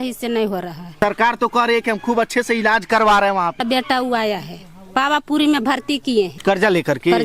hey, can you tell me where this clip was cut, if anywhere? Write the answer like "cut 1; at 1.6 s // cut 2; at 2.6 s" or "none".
cut 1; at 1.0 s // cut 2; at 3.6 s // cut 3; at 6.3 s